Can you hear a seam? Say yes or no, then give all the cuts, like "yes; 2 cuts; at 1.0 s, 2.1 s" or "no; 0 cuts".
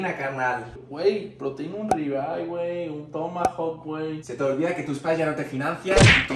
no; 0 cuts